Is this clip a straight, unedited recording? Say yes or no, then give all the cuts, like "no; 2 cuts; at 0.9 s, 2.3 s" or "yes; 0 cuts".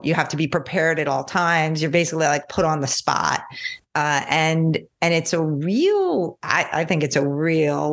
yes; 0 cuts